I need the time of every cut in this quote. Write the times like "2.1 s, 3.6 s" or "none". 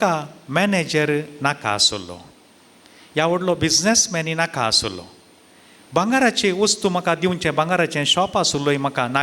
none